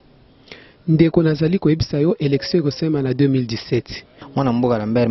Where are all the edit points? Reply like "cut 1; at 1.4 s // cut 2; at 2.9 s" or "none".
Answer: cut 1; at 4.1 s